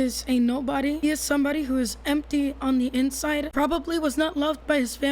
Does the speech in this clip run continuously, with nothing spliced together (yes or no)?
no